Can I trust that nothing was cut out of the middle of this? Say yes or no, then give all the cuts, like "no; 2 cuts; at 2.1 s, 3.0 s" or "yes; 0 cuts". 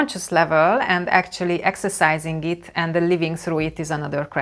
yes; 0 cuts